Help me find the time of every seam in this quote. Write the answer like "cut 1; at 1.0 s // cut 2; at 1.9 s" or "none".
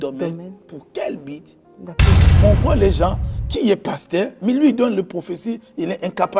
cut 1; at 2.3 s